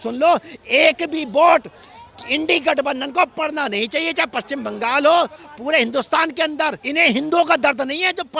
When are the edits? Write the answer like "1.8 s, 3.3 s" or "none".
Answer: 6.8 s